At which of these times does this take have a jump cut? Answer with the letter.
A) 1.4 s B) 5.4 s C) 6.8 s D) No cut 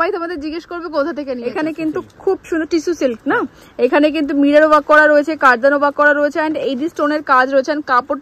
A